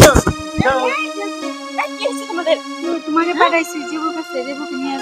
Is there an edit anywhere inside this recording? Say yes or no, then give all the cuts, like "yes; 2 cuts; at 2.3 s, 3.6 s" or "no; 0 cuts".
no; 0 cuts